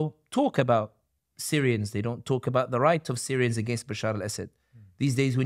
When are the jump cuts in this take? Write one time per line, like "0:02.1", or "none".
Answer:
none